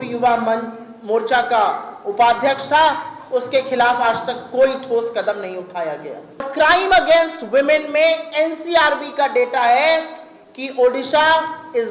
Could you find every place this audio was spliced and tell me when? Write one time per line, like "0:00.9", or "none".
0:06.5